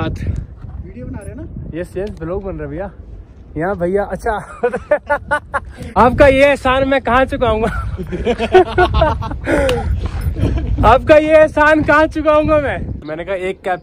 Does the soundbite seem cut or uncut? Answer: cut